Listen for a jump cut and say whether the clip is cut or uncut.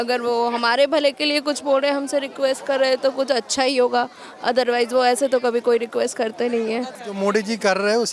cut